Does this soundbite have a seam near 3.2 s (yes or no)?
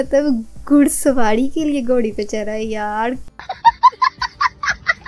yes